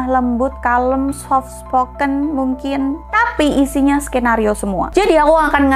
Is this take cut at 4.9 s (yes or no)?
yes